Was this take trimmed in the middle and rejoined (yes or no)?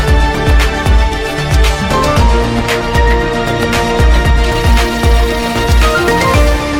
no